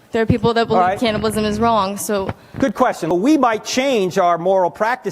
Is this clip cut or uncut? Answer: cut